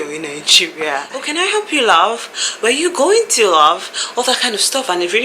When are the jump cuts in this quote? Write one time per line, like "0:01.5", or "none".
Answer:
0:01.2